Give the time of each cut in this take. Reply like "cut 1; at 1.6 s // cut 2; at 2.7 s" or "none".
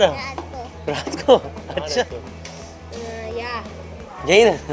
cut 1; at 2.1 s